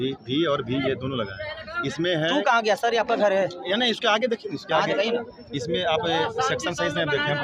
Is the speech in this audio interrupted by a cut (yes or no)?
no